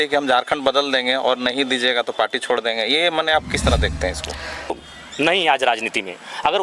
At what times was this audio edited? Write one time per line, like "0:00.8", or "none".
0:04.7